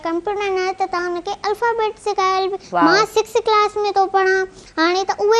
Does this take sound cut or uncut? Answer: cut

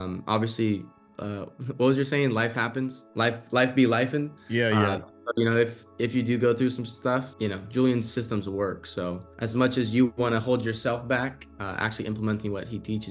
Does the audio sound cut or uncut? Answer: cut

